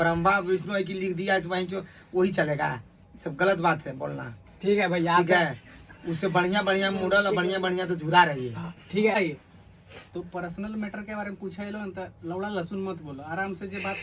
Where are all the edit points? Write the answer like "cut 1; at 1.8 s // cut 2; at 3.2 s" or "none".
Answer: cut 1; at 9.2 s